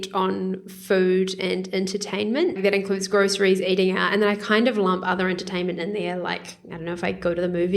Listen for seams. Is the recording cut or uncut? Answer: cut